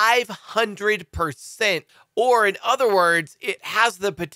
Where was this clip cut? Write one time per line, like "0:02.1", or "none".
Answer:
0:01.9